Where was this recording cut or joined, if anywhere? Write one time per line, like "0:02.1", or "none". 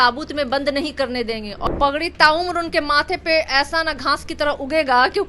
0:01.7